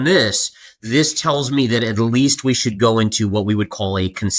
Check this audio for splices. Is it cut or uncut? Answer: uncut